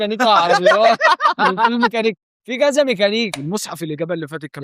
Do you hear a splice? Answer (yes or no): yes